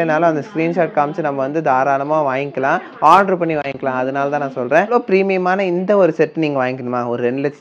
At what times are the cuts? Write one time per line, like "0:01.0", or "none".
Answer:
0:04.9